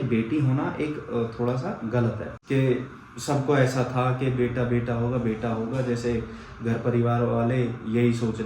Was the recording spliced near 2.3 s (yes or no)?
yes